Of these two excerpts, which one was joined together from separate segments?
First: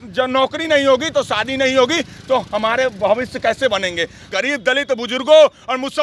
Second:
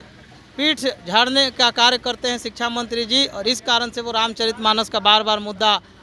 first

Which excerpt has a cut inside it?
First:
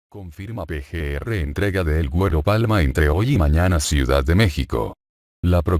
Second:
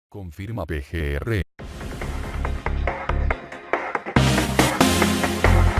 first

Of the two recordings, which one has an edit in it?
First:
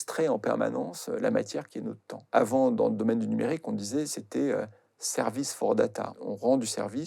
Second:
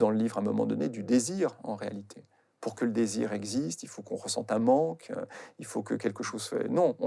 first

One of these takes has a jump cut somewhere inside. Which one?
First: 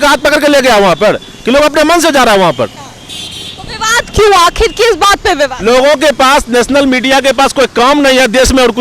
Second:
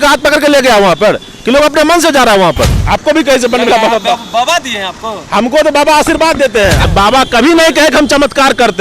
second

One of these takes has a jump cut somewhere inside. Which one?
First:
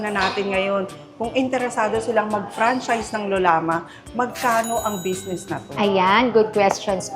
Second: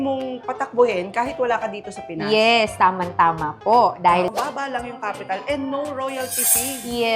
second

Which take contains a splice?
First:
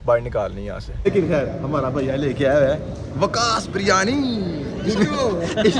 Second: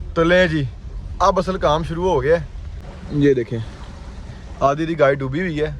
first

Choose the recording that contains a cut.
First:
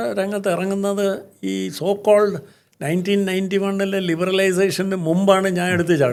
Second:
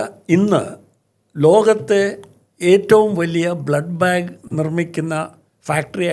second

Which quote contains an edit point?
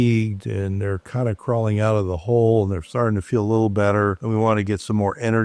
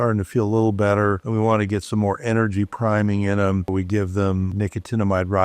second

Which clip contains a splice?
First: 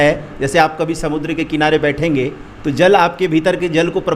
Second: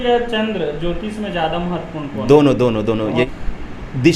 second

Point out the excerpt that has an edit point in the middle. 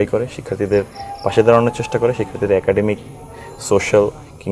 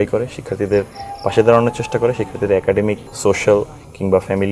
second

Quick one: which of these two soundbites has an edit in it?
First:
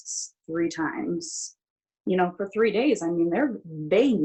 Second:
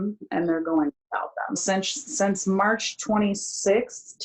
second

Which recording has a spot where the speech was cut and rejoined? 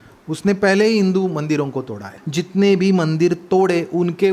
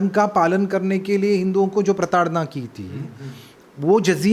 first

